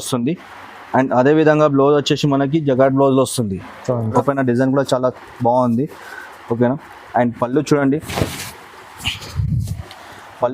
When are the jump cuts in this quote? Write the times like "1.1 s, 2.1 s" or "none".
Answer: 4.2 s